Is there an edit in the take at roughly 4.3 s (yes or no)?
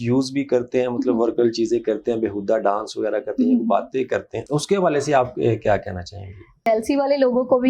no